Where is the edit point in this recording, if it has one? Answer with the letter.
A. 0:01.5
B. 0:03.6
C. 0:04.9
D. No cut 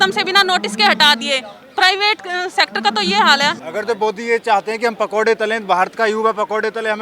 B